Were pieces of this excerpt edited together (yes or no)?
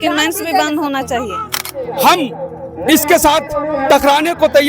yes